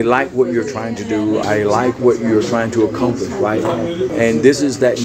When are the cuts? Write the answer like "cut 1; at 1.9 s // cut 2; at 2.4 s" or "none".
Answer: cut 1; at 1.4 s // cut 2; at 4.1 s